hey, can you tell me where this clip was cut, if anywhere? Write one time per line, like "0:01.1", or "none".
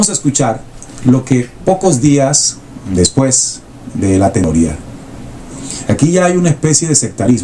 0:04.4